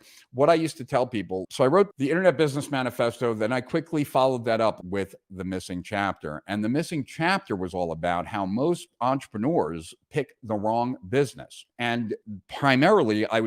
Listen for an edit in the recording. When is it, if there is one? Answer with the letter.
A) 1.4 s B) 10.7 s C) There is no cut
A